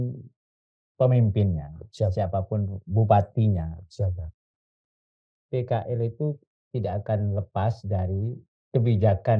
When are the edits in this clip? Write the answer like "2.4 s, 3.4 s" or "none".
none